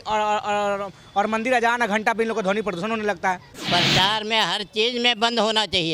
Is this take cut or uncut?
cut